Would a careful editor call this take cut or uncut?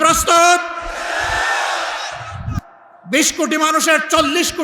cut